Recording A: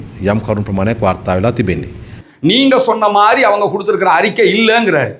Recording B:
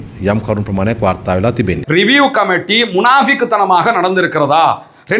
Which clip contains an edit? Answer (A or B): B